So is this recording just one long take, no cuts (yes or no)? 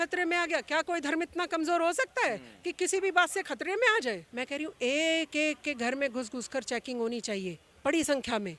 no